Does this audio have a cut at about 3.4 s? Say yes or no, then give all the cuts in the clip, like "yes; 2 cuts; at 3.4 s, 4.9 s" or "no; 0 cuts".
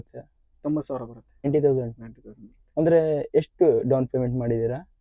no; 1 cut; at 1.4 s